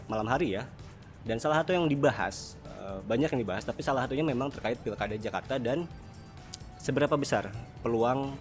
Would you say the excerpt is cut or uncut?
uncut